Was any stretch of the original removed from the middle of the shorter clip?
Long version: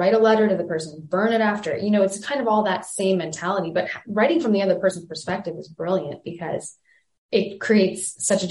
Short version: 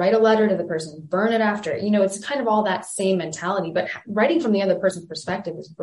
no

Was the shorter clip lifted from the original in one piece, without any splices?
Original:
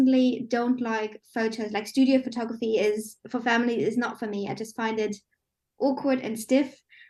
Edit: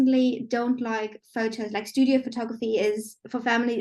yes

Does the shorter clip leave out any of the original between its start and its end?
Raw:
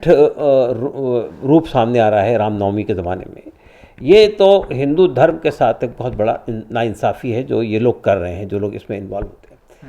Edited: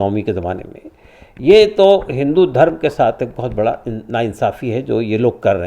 no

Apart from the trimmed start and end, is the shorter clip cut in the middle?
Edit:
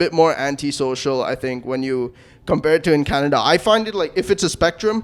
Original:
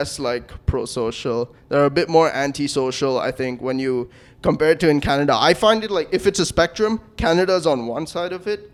no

